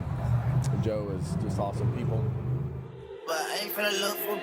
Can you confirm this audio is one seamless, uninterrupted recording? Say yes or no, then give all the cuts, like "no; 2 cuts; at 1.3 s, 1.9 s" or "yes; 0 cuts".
no; 1 cut; at 3.2 s